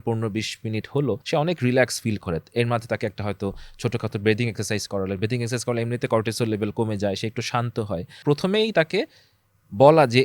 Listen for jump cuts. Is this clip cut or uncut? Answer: cut